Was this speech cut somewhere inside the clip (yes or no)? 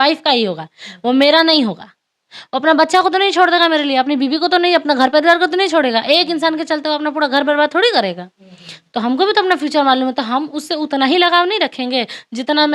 no